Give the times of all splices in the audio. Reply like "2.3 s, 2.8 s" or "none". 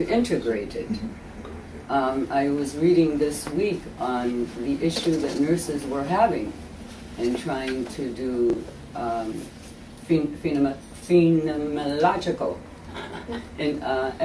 none